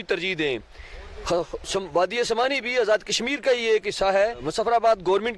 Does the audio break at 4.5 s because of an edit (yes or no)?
yes